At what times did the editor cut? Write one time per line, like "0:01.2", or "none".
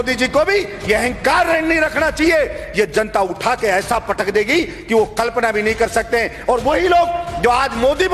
none